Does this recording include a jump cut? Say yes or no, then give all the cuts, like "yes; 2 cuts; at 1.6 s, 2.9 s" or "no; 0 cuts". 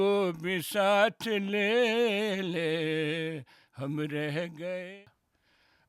yes; 1 cut; at 4.9 s